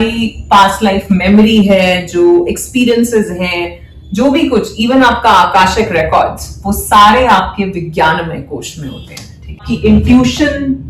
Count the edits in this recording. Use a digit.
1